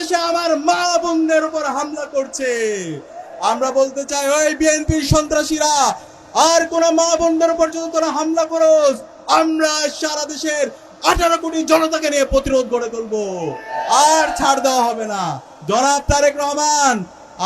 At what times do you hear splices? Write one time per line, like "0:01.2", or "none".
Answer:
0:15.5